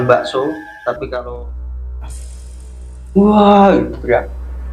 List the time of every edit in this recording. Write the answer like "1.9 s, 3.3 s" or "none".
1.3 s